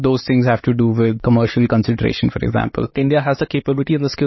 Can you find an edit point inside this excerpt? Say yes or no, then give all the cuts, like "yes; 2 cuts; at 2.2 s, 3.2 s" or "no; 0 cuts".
yes; 2 cuts; at 1.2 s, 2.9 s